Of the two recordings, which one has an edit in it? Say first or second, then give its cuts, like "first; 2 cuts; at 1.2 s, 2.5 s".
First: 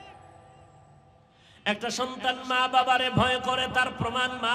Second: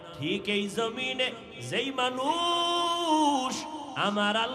first; 1 cut; at 1.4 s